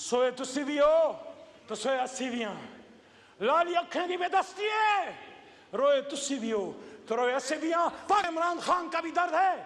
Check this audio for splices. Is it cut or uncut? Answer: cut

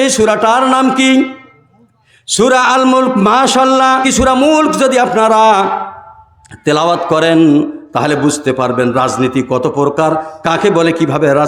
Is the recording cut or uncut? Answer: uncut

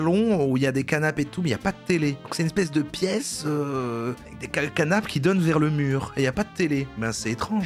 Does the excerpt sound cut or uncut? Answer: uncut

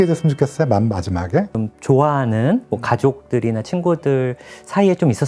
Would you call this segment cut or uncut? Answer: cut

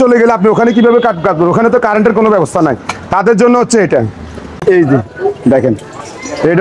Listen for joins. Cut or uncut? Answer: cut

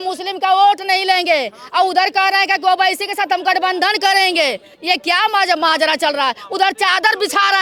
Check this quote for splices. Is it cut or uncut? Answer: uncut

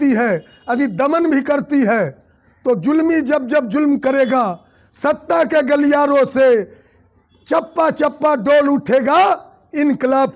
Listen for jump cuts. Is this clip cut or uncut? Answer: uncut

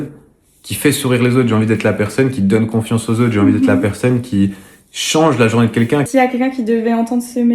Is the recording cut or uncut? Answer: cut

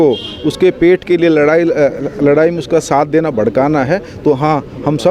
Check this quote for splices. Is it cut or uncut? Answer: uncut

